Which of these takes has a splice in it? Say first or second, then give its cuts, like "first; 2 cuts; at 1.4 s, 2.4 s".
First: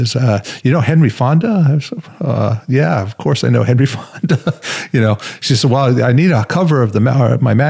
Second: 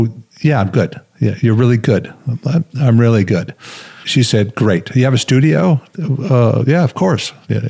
second; 1 cut; at 4.0 s